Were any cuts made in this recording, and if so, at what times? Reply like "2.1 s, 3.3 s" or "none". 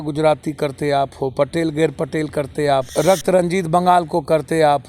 2.9 s